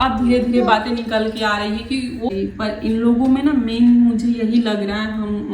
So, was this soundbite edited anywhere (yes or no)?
yes